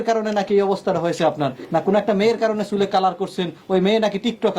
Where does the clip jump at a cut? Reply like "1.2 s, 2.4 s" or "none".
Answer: 1.6 s